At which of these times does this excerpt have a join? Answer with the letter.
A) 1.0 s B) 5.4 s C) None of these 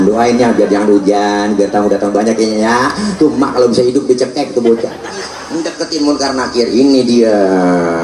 B